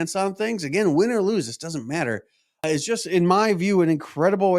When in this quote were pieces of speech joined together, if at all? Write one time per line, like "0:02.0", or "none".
0:02.6